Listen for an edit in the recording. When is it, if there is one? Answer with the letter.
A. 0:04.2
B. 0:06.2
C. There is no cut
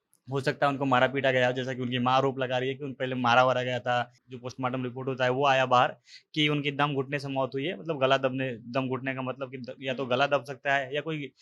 A